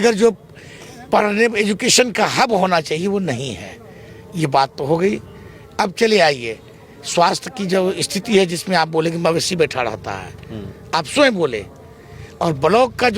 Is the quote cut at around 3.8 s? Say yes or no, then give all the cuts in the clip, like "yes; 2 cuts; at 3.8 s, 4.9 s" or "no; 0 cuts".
no; 0 cuts